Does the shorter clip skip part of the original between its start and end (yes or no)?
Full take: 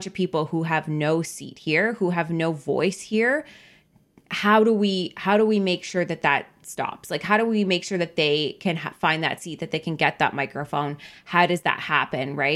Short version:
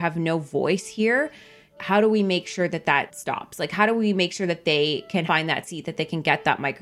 yes